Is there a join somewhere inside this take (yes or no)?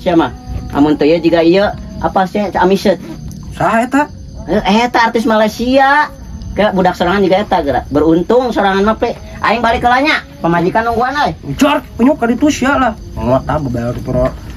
no